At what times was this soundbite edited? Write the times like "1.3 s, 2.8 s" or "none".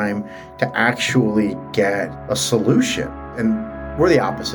2.2 s, 3.2 s

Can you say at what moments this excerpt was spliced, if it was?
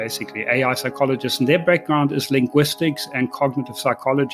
none

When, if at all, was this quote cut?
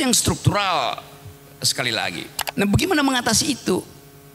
2.4 s

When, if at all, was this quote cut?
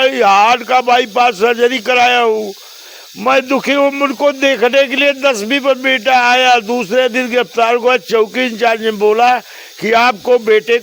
none

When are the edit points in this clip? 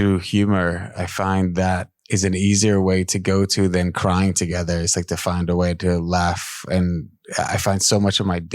1.9 s

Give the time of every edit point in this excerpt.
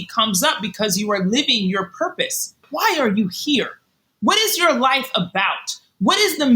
2.6 s

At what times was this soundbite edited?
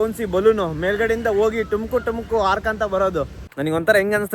3.4 s

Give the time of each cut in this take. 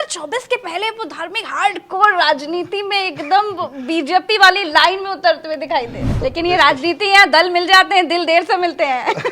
6.0 s

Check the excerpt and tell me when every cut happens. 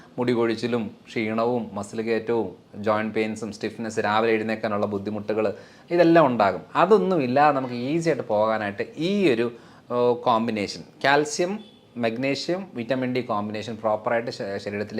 none

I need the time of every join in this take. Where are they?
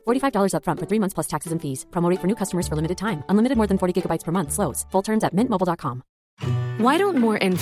6.3 s

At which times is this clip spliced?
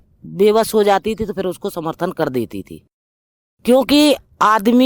none

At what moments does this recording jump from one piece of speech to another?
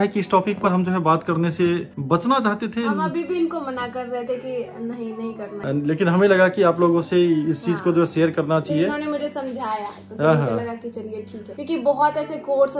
none

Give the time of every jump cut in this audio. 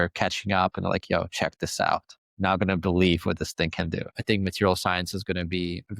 2.2 s, 4.1 s

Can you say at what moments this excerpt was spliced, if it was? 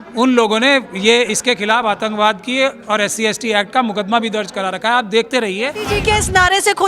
5.9 s

